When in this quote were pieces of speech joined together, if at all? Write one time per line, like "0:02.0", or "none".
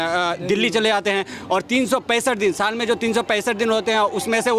none

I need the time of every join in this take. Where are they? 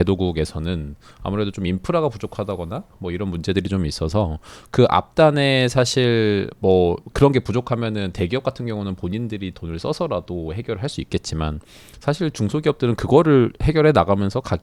none

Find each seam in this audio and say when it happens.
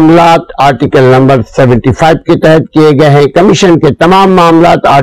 none

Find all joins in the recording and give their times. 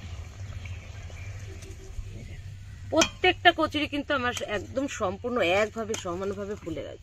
0:02.0

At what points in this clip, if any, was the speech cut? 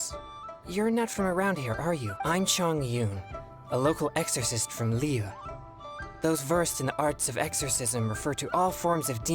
0:02.1

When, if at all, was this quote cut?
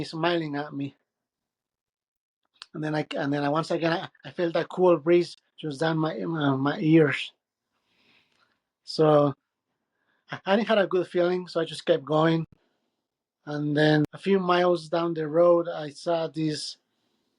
0:14.0

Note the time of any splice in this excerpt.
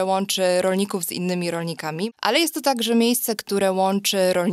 0:02.1

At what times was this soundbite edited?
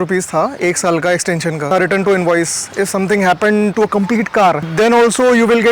0:01.7

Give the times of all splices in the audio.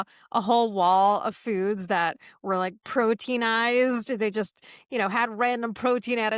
none

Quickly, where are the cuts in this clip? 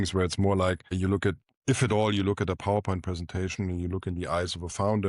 0:00.9

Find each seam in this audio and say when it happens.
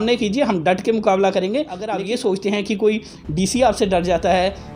0:01.9

